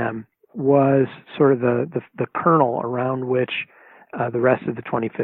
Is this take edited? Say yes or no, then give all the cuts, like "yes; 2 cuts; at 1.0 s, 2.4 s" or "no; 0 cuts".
no; 0 cuts